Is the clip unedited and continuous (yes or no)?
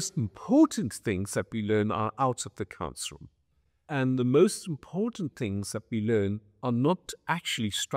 yes